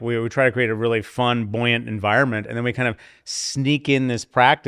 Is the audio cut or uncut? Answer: uncut